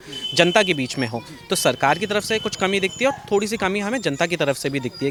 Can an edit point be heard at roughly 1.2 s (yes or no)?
no